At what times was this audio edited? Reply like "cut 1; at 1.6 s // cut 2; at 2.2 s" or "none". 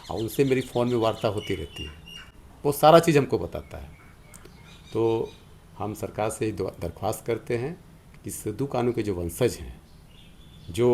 none